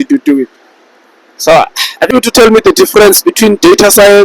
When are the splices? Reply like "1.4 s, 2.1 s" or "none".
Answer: 2.1 s